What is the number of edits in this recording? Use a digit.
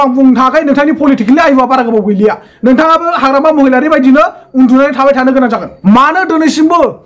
1